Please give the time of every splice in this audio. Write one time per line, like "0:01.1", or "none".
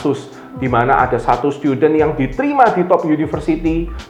none

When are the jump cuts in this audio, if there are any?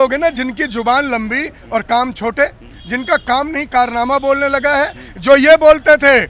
none

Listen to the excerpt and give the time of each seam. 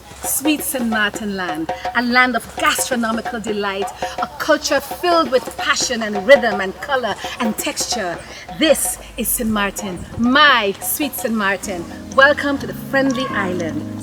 none

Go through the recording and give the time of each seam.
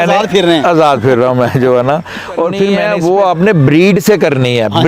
0:02.8

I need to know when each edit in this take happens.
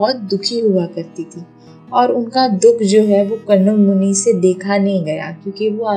none

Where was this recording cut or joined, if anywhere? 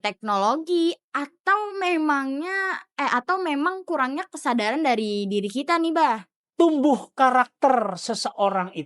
0:06.4

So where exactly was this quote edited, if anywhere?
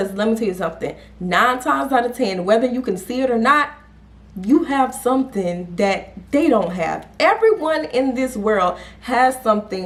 none

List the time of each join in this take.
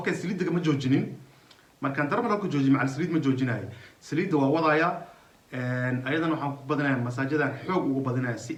none

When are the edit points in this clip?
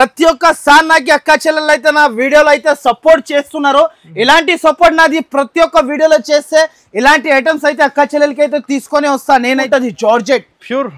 0:09.7

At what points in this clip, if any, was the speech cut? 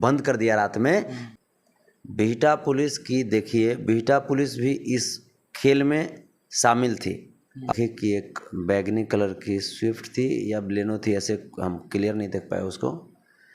0:01.2
0:07.7

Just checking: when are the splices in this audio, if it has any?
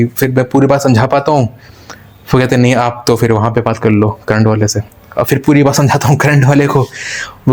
none

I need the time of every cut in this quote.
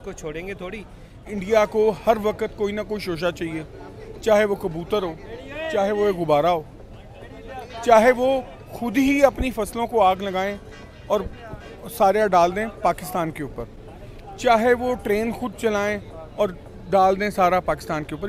0:01.2

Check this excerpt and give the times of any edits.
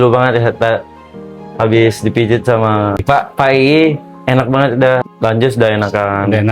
0:03.0
0:05.1

